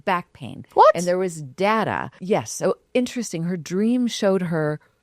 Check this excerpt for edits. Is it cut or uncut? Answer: cut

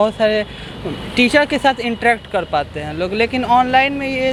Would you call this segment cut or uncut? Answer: uncut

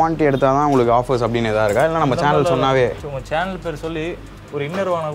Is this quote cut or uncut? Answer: uncut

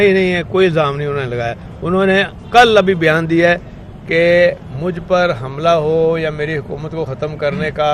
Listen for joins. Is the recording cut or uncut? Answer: uncut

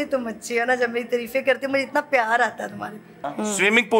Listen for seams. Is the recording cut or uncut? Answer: cut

